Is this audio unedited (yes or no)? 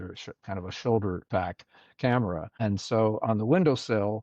no